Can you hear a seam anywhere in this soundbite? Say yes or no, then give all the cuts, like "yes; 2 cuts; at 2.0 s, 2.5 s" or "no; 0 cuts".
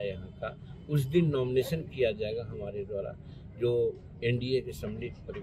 no; 0 cuts